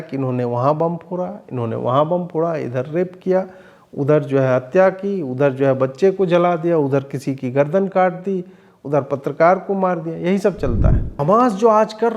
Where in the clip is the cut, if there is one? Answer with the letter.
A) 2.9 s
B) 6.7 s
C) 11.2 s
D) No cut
C